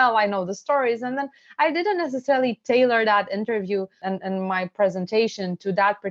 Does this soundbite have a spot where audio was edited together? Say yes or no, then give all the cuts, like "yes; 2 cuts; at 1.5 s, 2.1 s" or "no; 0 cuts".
yes; 1 cut; at 3.9 s